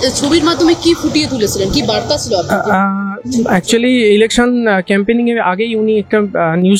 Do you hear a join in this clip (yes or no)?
no